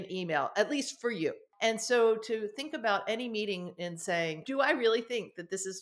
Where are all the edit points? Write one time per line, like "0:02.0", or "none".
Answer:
0:01.5
0:04.4